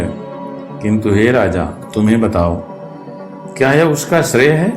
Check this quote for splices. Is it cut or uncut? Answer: uncut